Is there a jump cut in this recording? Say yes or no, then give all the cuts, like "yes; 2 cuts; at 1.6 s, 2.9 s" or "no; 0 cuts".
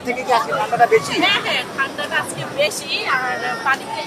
no; 0 cuts